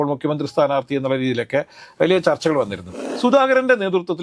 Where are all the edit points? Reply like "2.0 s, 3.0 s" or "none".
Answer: 3.0 s

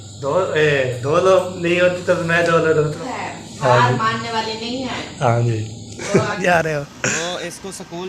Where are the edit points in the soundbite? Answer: 3.0 s, 6.4 s

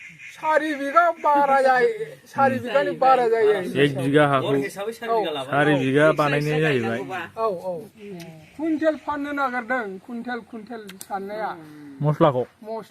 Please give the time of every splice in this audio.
7.9 s

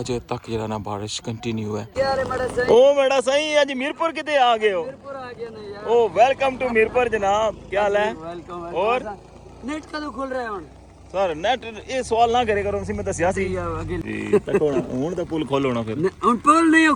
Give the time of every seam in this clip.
1.9 s, 14.0 s

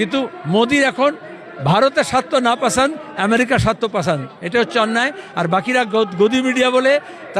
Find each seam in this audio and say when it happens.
none

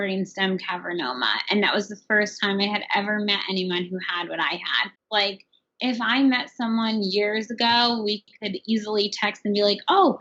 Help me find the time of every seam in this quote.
4.9 s

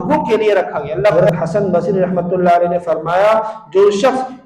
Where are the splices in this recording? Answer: 1.1 s

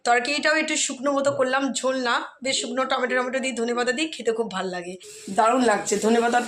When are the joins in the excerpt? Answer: 4.9 s

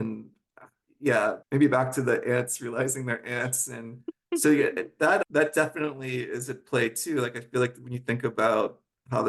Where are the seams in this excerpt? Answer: 1.4 s

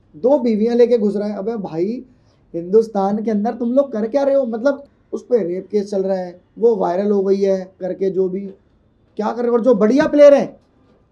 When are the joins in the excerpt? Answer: 4.9 s, 7.8 s

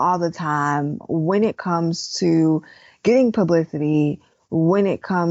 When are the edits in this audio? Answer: 1.0 s

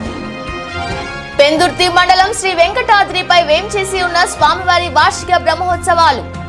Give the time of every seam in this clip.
1.2 s

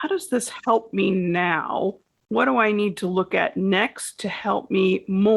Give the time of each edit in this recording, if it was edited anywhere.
2.1 s

